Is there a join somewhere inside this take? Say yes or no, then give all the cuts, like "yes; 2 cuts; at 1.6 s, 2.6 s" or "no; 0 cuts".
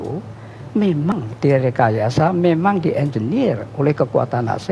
yes; 1 cut; at 1.1 s